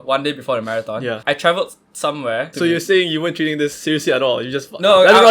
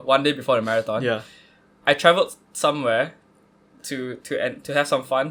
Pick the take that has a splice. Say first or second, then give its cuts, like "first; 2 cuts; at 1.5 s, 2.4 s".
first; 2 cuts; at 1.2 s, 2.5 s